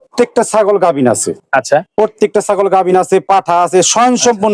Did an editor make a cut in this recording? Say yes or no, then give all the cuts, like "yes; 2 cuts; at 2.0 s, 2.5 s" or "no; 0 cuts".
no; 0 cuts